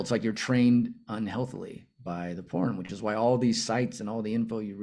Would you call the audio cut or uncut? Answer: uncut